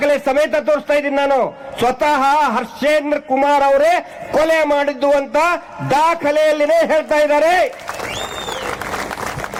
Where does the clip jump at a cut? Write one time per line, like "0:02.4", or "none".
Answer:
none